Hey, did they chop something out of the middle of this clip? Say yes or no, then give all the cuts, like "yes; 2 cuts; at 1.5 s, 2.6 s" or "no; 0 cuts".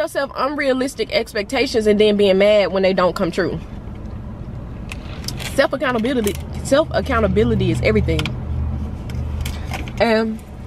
no; 0 cuts